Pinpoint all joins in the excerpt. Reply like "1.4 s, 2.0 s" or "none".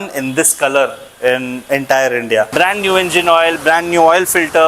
2.5 s

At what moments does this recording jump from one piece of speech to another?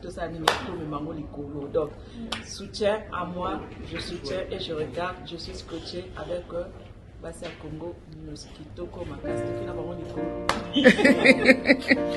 none

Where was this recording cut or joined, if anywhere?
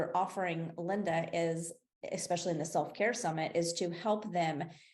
none

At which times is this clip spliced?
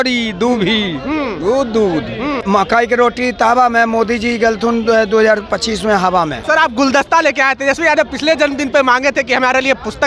2.4 s, 6.4 s

